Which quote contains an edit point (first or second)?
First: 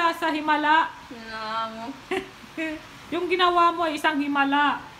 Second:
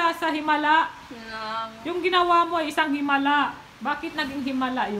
second